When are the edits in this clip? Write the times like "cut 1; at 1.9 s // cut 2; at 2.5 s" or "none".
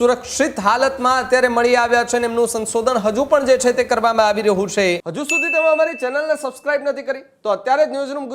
cut 1; at 5.1 s